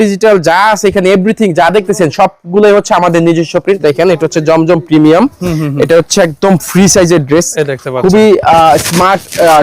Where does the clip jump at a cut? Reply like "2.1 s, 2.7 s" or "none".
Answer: 3.8 s